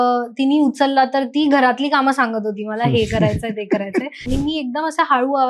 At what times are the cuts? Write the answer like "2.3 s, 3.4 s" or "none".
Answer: 4.2 s